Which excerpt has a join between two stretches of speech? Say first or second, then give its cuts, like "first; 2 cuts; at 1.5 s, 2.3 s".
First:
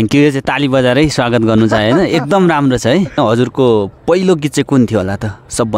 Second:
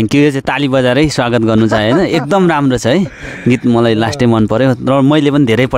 first; 1 cut; at 3.1 s